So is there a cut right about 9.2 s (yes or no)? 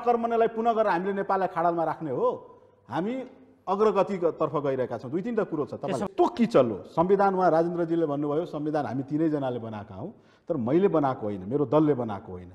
no